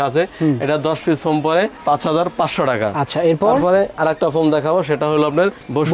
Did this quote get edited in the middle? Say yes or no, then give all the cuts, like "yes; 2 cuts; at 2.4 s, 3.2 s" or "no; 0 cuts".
no; 0 cuts